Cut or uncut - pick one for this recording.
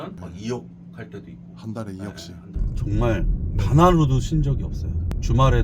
cut